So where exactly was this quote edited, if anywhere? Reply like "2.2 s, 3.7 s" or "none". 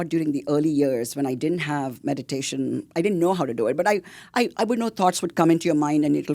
none